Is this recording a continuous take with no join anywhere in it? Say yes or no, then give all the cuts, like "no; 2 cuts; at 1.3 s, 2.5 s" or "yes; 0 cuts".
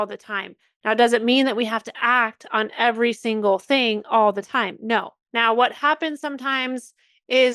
no; 1 cut; at 5.2 s